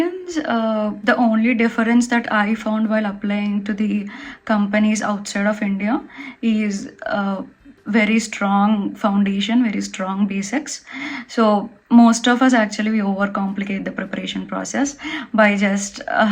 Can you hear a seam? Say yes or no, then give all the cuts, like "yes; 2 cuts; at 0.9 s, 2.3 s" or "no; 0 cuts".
no; 0 cuts